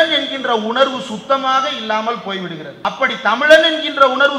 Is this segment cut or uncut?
cut